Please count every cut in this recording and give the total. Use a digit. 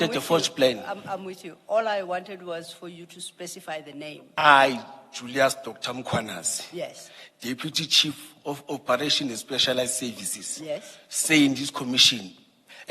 1